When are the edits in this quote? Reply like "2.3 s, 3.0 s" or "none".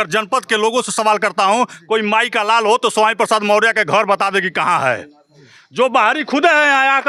none